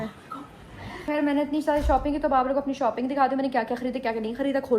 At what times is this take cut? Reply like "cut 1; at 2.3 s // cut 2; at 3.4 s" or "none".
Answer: cut 1; at 1.1 s